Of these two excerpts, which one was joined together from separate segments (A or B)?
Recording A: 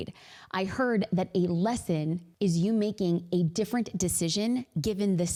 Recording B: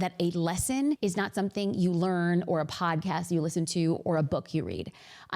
B